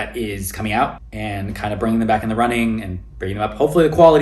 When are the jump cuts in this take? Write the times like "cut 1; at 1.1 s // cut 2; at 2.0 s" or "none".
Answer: cut 1; at 1.1 s

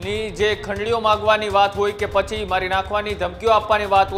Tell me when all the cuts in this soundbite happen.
none

